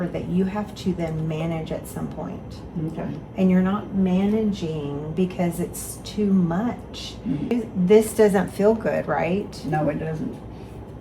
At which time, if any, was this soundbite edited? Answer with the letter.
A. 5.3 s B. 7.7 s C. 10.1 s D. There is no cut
B